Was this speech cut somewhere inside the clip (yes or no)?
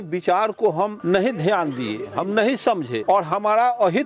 yes